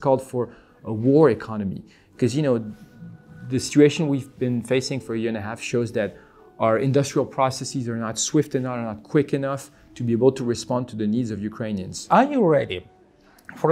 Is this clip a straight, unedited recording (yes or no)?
yes